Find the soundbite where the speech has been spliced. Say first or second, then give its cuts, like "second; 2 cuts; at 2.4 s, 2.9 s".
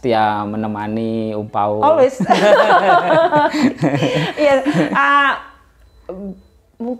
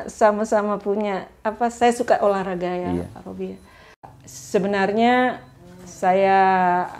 second; 1 cut; at 4.1 s